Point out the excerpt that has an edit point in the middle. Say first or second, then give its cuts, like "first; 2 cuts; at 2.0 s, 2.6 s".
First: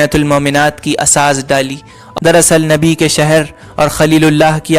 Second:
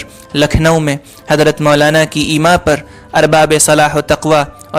first; 1 cut; at 2.0 s